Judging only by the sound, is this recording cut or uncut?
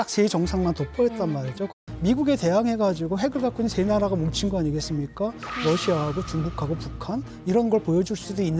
cut